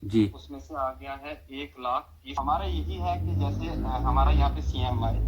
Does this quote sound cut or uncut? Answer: cut